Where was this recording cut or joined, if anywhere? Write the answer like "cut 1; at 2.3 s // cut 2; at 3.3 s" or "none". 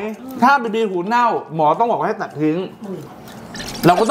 none